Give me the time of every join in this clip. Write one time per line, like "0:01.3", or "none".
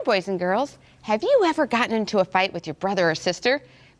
0:01.3